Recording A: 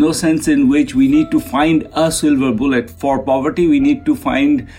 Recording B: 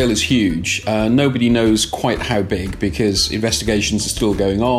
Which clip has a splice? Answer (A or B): A